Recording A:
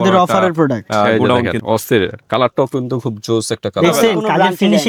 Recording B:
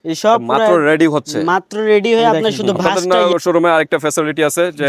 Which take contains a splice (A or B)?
B